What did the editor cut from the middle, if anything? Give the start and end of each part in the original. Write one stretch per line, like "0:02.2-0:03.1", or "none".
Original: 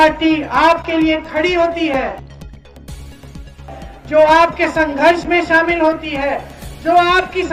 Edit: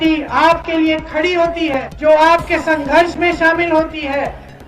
0:02.1-0:04.0